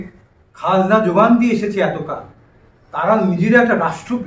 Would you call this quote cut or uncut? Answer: uncut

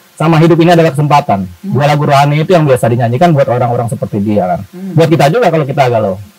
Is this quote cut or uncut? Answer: uncut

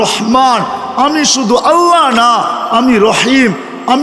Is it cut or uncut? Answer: uncut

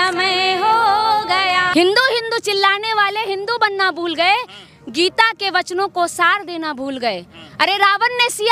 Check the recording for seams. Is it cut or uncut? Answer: cut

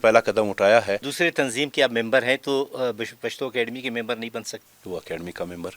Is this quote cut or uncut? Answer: cut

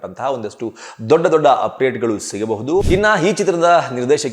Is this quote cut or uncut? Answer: cut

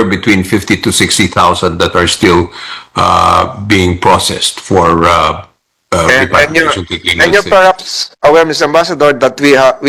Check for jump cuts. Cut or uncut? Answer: uncut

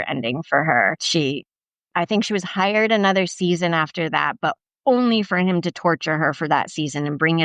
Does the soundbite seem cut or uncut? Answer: cut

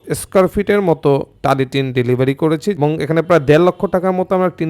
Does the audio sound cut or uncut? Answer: cut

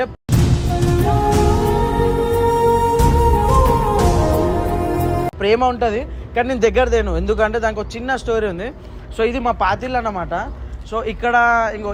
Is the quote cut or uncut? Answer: uncut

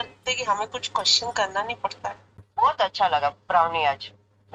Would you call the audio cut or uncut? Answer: cut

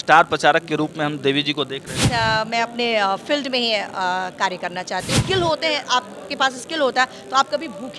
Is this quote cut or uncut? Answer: cut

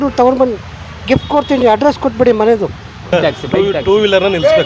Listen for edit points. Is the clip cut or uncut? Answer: cut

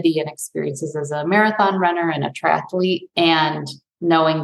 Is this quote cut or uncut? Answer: uncut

